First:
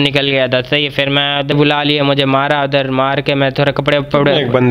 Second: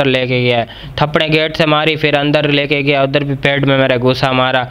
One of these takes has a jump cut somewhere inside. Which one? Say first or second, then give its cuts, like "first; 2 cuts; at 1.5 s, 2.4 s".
first; 1 cut; at 1.5 s